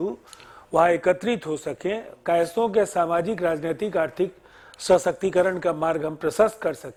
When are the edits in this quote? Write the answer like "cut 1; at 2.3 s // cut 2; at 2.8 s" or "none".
none